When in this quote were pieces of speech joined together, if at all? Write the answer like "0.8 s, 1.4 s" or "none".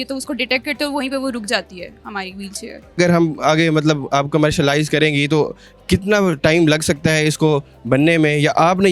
none